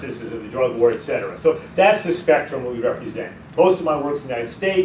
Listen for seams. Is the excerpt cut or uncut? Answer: uncut